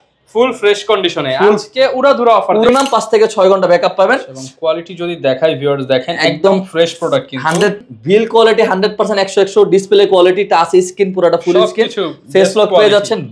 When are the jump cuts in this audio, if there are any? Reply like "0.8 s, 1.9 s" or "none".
2.7 s, 7.8 s